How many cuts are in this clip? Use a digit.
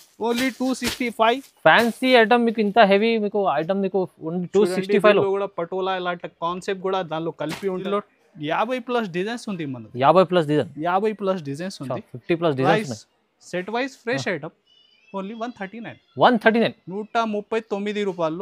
1